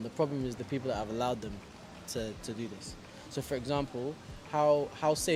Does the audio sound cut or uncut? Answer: uncut